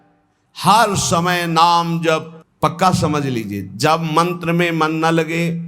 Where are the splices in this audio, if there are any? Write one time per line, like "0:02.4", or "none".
0:02.4